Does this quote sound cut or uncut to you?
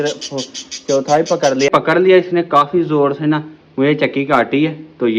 cut